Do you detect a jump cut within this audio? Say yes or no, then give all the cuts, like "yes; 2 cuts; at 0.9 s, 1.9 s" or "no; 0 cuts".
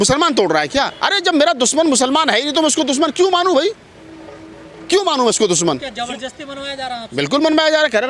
no; 0 cuts